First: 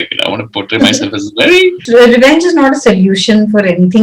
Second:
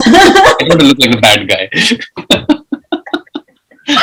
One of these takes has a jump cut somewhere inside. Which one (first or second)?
first